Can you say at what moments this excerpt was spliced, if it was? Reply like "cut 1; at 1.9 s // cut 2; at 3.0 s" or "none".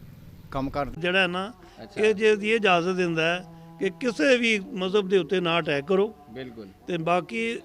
cut 1; at 1.0 s